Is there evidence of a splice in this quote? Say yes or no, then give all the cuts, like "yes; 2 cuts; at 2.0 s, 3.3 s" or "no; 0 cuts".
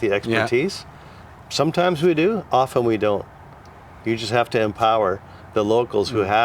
no; 0 cuts